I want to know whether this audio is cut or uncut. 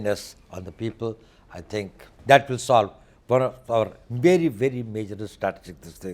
cut